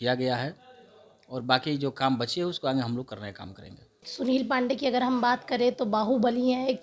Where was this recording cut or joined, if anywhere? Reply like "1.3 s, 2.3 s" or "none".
4.0 s